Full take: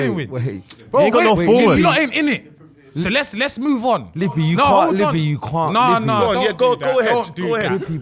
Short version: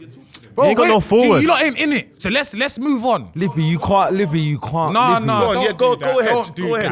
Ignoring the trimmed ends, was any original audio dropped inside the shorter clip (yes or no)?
yes